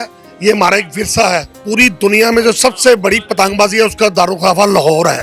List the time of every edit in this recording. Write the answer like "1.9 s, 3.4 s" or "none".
1.5 s

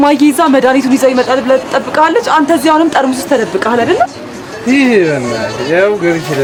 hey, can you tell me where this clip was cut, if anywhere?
none

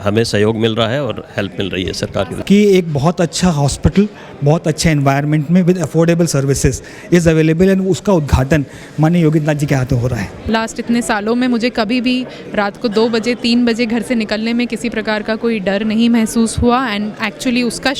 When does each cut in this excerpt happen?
2.3 s, 10.3 s

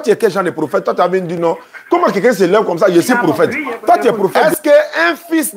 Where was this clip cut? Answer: 4.3 s

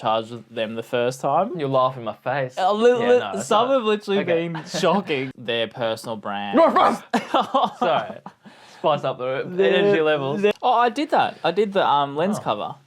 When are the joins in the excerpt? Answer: 5.3 s, 10.5 s

